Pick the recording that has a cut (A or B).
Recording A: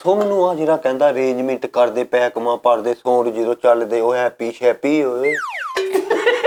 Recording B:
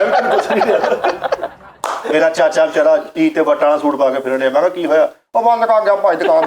B